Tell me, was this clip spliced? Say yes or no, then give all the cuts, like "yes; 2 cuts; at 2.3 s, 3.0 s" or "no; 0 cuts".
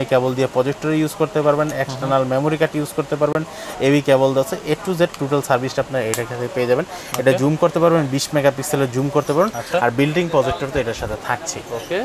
no; 0 cuts